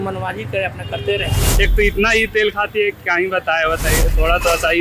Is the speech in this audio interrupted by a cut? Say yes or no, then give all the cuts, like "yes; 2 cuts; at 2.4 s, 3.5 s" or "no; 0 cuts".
yes; 1 cut; at 1.4 s